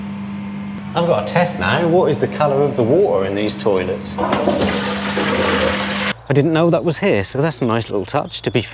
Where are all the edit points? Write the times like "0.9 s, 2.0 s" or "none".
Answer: 0.8 s, 6.1 s

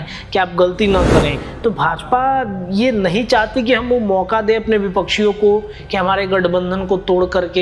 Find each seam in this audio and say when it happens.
1.3 s

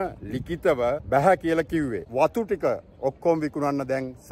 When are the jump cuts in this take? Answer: 1.0 s, 2.0 s

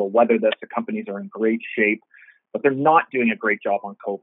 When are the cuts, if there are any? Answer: none

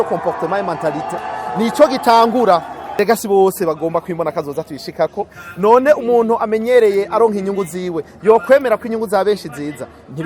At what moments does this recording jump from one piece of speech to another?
3.0 s

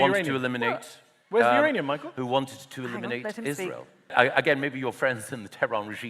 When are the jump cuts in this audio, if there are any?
4.1 s

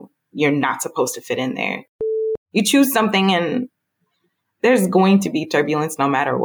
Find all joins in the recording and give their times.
2.0 s

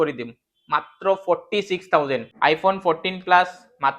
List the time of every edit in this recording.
2.3 s

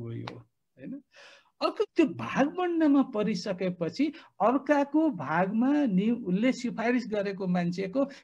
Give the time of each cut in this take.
1.8 s

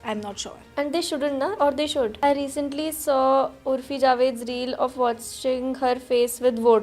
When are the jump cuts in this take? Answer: 2.1 s

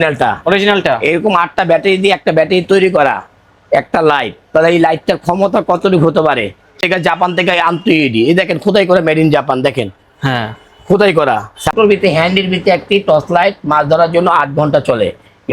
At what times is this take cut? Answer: 6.8 s, 11.7 s

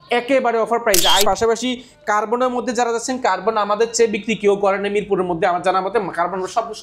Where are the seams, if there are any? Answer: 1.2 s

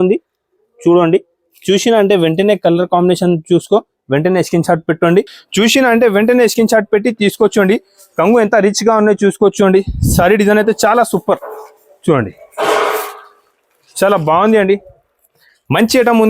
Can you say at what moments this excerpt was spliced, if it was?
5.4 s

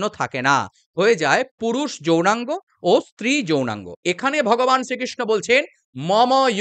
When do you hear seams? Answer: 3.9 s

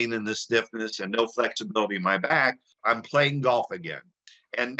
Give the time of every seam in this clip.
2.7 s

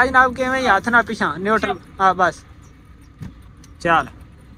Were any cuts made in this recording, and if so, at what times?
none

